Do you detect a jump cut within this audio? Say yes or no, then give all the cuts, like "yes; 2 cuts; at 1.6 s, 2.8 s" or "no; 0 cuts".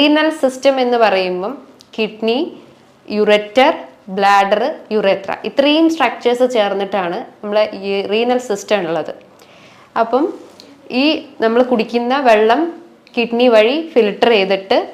no; 0 cuts